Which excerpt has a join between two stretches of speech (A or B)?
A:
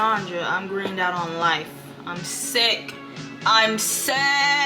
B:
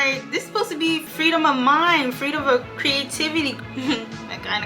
B